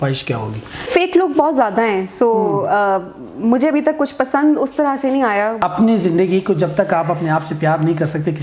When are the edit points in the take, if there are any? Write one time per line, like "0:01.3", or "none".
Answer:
0:00.9
0:05.6

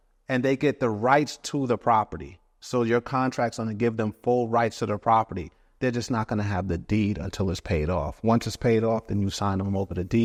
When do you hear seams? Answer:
none

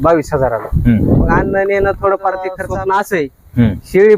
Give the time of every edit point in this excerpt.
0:02.6

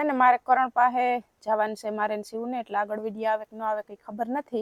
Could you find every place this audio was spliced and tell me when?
none

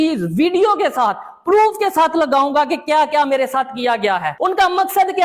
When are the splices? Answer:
0:04.3

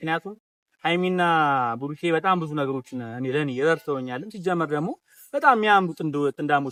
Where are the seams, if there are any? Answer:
none

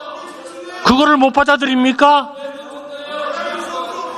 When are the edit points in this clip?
none

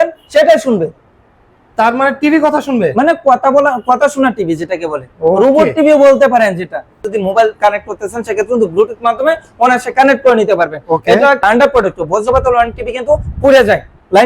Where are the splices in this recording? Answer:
0:07.1
0:11.4

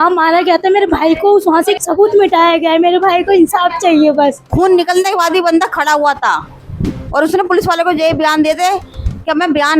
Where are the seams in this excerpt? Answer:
0:01.8
0:04.4

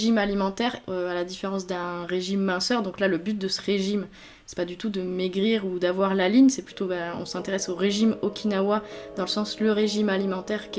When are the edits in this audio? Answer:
none

